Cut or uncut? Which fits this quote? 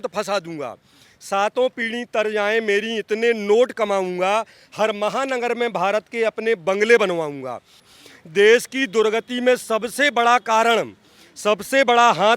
cut